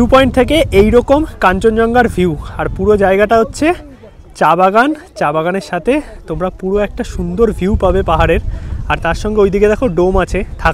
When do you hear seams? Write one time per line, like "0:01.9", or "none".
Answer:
none